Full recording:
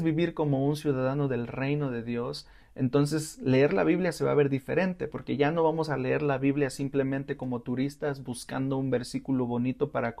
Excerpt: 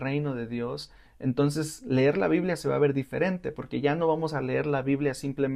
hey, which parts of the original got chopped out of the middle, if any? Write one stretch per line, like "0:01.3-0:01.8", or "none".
none